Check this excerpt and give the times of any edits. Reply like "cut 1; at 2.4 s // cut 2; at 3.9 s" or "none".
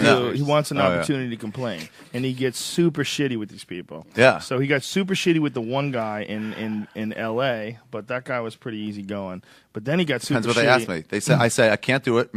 none